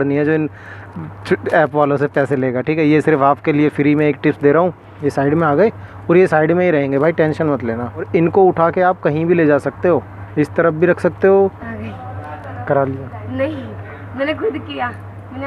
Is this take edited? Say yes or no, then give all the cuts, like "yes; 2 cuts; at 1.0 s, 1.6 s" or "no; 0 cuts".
yes; 2 cuts; at 4.9 s, 11.6 s